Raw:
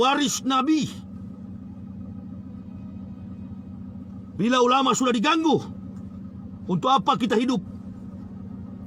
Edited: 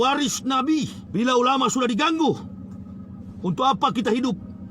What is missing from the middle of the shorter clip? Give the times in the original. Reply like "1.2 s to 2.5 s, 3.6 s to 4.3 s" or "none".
1.0 s to 4.2 s